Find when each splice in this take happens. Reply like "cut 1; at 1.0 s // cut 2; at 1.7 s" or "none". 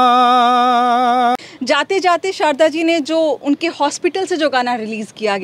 cut 1; at 1.4 s